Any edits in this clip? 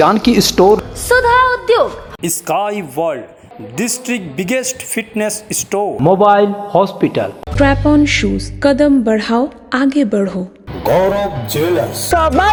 no; 0 cuts

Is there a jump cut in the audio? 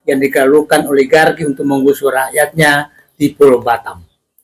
no; 0 cuts

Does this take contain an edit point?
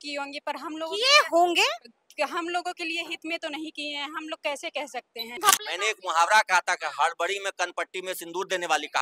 yes; 1 cut; at 5.4 s

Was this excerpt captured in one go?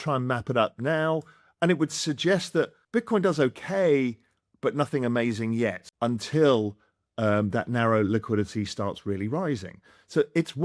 no; 2 cuts; at 2.8 s, 5.8 s

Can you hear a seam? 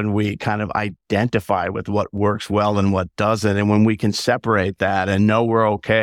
no; 0 cuts

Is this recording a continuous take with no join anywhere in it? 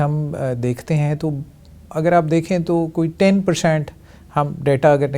yes; 0 cuts

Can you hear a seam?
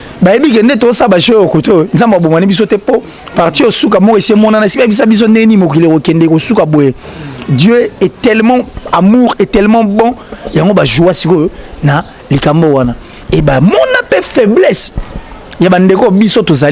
no; 0 cuts

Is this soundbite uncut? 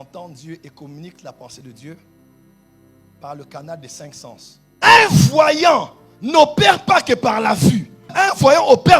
no; 1 cut; at 4.7 s

